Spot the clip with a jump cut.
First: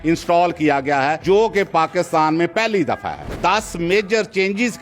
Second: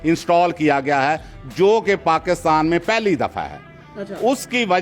first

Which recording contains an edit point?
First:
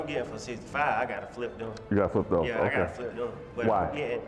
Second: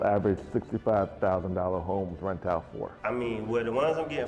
second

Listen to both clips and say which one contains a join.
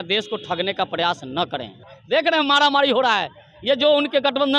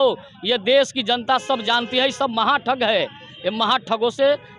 first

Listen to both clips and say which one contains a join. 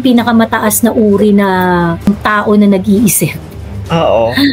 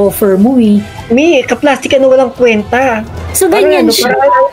second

